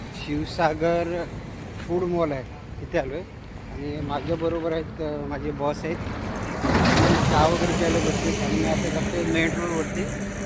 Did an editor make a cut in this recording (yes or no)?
no